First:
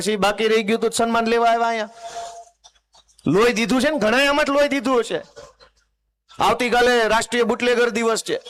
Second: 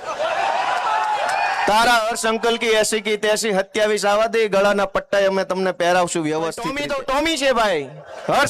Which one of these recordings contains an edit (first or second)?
second